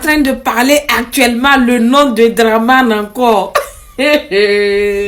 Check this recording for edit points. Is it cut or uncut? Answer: uncut